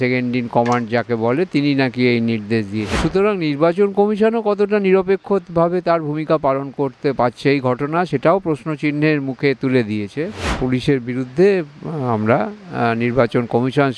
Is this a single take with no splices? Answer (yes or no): no